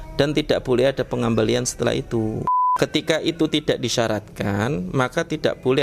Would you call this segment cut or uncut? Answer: cut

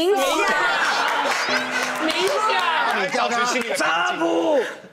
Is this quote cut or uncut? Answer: cut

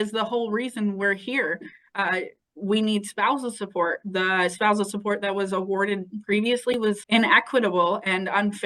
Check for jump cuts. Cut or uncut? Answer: cut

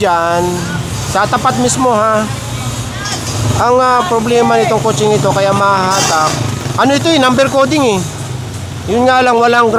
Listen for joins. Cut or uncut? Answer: uncut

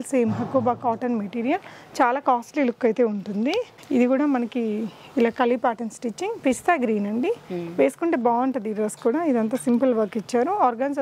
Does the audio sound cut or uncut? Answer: uncut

